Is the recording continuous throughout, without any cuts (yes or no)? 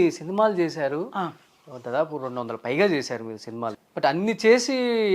no